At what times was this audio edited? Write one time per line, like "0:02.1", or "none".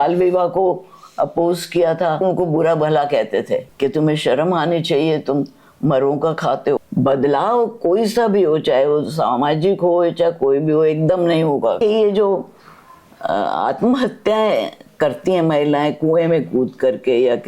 0:02.2
0:06.8
0:11.8